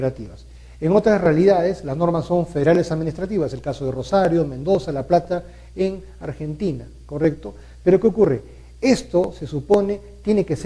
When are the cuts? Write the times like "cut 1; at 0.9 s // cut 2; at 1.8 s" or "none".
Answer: cut 1; at 8.5 s